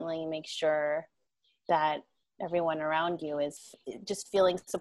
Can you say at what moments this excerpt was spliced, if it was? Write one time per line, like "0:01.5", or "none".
0:03.5